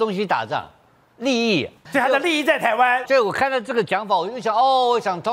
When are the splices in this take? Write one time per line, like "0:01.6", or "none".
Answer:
0:01.8
0:03.0

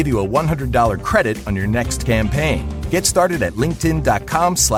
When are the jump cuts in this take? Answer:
none

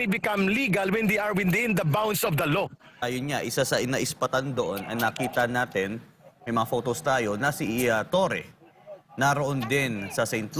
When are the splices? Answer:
0:03.0

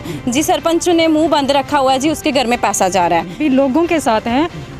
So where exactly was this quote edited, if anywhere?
0:03.4

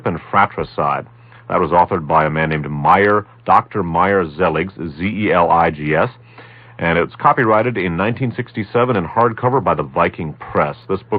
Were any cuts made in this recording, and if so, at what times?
0:02.3

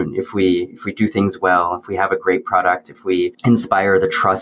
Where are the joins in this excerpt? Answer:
0:03.4

